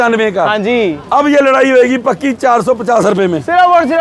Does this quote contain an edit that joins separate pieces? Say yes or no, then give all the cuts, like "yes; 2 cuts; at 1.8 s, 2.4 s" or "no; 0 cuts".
no; 0 cuts